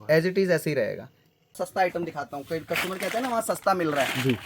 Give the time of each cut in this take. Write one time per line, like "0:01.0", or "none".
0:01.5